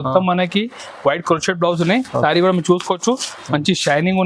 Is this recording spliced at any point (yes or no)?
no